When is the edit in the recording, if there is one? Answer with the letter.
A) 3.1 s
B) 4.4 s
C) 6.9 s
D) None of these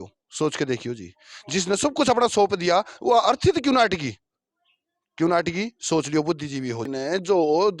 C